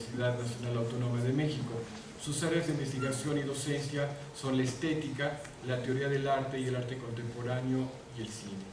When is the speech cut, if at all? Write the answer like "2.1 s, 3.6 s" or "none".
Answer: none